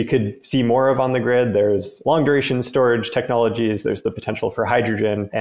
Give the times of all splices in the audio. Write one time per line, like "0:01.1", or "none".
0:02.0